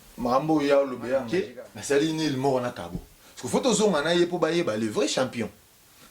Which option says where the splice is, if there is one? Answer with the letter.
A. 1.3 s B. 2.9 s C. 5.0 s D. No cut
A